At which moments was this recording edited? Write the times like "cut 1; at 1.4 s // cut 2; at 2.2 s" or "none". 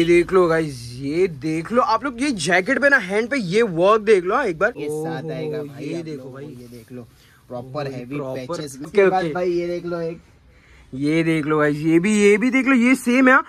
cut 1; at 4.8 s // cut 2; at 8.9 s